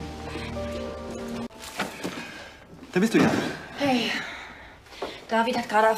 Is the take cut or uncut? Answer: uncut